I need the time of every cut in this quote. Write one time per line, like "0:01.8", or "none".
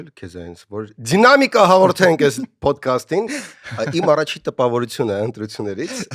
none